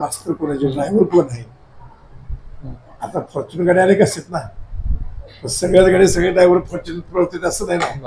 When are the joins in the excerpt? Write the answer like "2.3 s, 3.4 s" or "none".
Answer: none